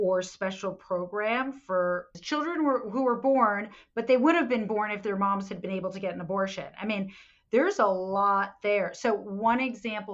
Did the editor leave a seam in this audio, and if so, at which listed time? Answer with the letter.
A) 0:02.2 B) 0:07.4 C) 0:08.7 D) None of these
A